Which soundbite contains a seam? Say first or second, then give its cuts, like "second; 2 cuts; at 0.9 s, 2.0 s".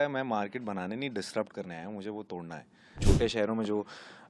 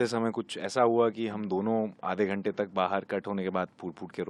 first; 1 cut; at 3.0 s